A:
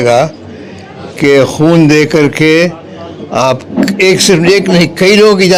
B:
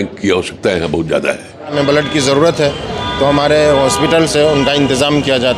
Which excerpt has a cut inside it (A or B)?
B